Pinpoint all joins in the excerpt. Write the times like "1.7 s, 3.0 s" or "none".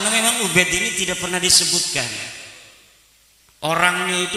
none